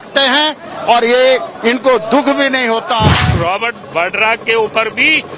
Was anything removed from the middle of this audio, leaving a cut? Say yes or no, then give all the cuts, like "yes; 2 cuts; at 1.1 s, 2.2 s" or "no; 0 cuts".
yes; 1 cut; at 3.3 s